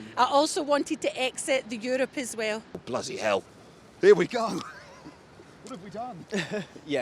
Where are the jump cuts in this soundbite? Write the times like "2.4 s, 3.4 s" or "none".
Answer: 2.8 s